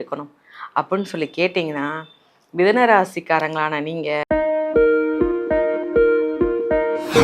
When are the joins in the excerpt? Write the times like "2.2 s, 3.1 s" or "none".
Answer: 4.2 s